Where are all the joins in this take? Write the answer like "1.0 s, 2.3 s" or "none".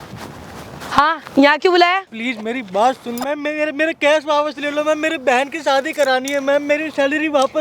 2.1 s, 3.2 s

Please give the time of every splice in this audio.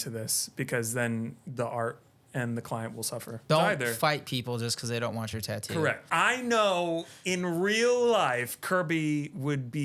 3.4 s, 6.1 s

